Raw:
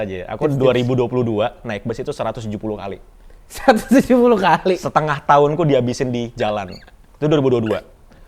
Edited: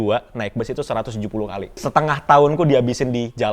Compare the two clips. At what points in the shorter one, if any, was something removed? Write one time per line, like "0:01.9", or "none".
0:01.8